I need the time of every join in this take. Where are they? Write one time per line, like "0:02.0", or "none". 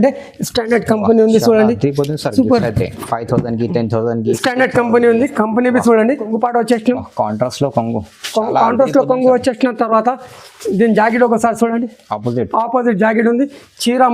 0:06.2